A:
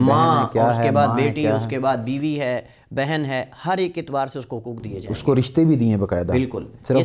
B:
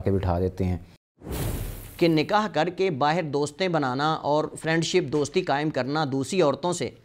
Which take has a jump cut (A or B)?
B